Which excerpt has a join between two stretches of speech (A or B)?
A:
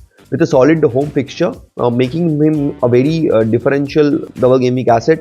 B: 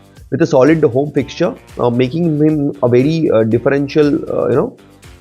A